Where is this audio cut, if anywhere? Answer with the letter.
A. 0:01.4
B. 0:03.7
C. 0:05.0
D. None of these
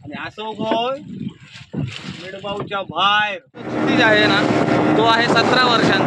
B